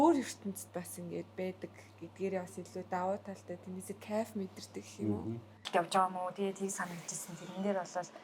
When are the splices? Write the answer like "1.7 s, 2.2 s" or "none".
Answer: 5.7 s